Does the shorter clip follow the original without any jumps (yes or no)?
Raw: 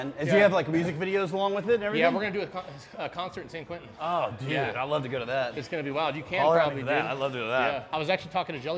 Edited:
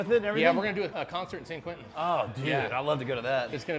no